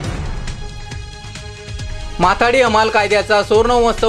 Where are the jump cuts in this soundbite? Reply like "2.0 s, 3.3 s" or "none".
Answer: 2.0 s